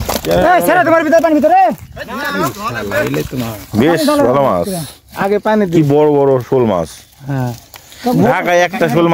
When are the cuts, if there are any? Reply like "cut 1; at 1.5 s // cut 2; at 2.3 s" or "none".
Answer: none